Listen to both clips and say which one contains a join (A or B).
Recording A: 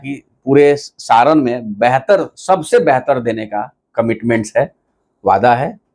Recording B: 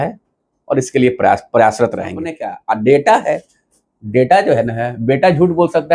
B